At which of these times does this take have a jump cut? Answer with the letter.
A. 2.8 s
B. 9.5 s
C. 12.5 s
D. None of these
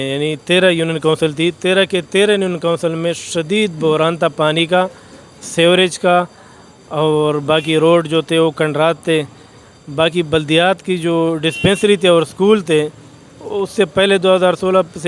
D